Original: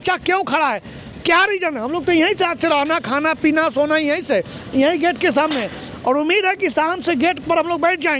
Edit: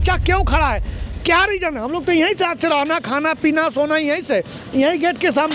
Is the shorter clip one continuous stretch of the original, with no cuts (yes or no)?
yes